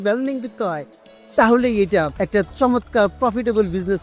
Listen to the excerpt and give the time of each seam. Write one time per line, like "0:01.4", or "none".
0:02.2